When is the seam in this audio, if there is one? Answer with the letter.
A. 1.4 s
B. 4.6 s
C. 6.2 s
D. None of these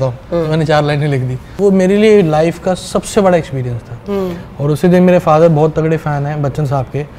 A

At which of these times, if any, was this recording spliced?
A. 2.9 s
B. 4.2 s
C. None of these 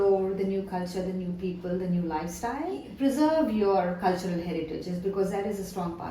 A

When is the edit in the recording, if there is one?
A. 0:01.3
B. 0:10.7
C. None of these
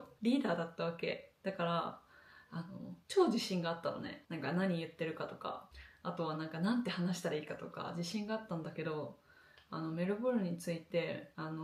C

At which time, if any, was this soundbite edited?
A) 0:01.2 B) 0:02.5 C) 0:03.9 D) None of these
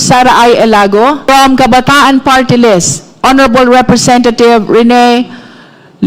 A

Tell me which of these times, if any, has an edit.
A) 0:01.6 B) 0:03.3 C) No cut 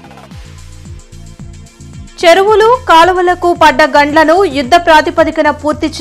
A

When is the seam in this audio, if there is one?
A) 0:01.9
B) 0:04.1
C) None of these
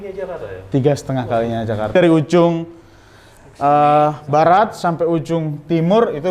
A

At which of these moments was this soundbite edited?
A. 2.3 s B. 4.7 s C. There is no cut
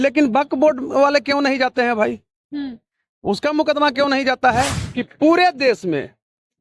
B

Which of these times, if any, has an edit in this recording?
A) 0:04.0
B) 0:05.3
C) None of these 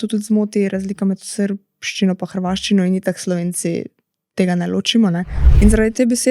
B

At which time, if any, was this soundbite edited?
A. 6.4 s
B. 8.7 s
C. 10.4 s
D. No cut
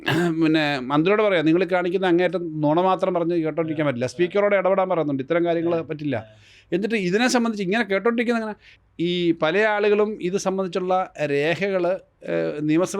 B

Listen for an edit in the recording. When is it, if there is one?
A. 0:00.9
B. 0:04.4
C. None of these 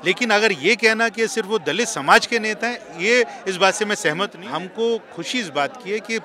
B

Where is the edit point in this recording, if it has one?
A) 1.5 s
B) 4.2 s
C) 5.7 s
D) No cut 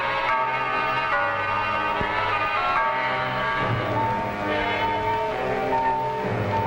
A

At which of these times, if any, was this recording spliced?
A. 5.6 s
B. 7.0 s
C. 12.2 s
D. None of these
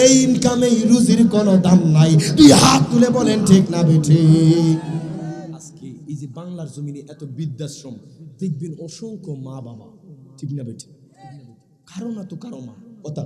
A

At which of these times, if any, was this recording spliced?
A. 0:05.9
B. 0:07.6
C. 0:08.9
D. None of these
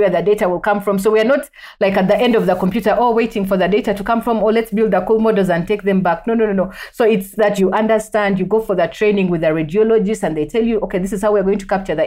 B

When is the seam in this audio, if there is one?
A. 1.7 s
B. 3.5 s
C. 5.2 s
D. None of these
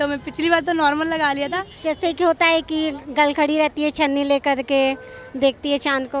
A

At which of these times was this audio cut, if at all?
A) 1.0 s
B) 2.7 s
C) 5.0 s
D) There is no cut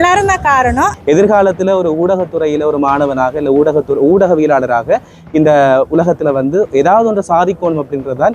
A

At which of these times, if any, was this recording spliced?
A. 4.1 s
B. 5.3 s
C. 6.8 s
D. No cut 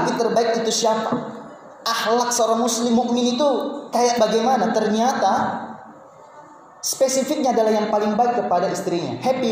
D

